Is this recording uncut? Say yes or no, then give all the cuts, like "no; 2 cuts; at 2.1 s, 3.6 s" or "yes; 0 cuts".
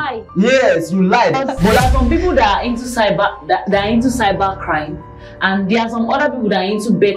no; 1 cut; at 1.6 s